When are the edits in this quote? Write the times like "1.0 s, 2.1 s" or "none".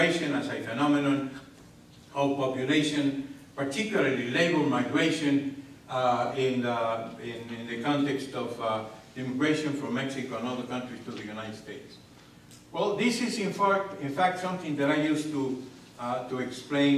8.5 s